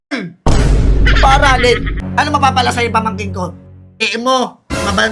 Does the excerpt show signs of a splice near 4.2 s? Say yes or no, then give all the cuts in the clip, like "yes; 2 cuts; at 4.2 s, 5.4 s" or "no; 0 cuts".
no; 1 cut; at 2.0 s